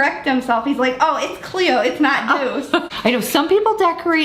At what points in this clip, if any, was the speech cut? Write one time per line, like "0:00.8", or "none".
0:02.9